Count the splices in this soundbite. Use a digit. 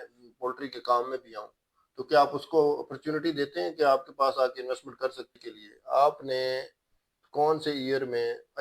1